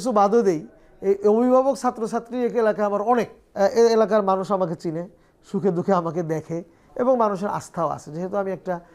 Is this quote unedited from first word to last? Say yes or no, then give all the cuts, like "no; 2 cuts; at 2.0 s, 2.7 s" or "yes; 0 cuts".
no; 2 cuts; at 3.4 s, 6.8 s